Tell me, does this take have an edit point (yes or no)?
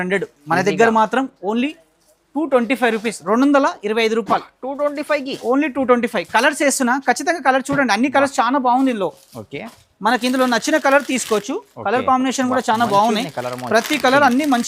no